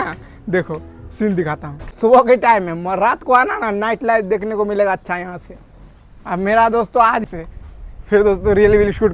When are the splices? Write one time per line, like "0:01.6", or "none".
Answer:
0:01.9
0:07.2